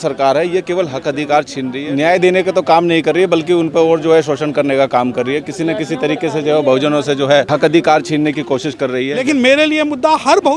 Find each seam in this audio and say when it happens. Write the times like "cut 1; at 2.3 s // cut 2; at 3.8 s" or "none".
cut 1; at 1.8 s // cut 2; at 7.5 s // cut 3; at 9.2 s